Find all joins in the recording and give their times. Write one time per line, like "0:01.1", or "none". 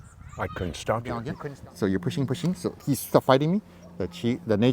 0:01.3